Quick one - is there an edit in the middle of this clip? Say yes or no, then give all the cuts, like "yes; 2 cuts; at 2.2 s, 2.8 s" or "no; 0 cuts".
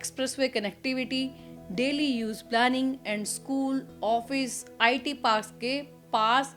no; 0 cuts